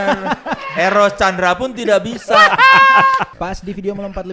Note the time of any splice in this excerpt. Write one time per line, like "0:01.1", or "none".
0:03.3